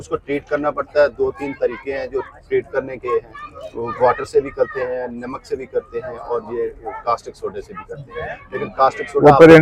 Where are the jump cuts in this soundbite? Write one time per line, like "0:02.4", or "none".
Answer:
none